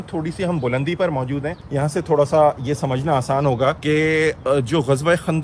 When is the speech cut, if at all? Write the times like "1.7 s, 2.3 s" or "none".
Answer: 1.6 s, 3.8 s